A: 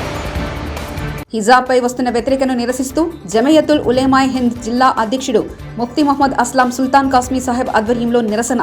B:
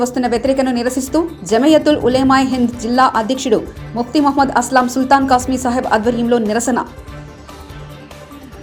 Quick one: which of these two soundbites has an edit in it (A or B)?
A